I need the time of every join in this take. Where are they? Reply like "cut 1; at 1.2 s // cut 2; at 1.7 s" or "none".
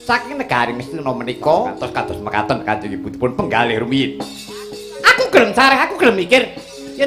cut 1; at 1.7 s